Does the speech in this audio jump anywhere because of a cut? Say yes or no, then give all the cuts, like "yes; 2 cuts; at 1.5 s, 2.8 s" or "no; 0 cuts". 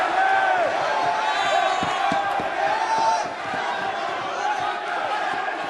no; 0 cuts